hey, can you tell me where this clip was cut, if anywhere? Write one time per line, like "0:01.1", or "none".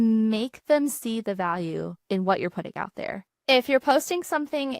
0:03.2